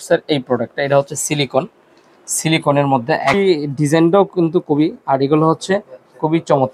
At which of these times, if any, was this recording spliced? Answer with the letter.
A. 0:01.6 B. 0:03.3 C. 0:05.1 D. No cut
B